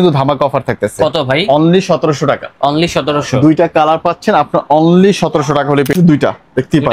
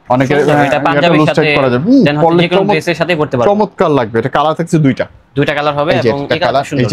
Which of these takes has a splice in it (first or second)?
first